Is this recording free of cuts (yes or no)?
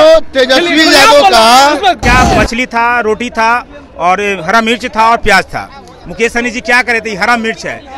no